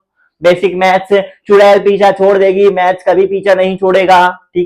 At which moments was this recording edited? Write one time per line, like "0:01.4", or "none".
none

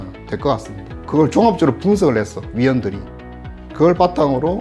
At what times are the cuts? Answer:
0:01.0

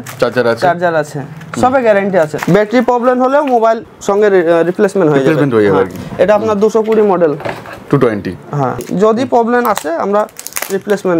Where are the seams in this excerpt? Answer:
0:02.4
0:03.9
0:08.9

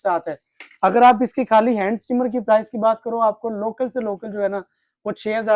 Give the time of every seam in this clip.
none

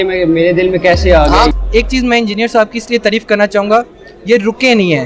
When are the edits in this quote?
0:01.5

